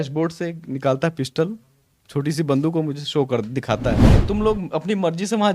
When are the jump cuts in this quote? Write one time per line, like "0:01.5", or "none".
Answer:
0:04.2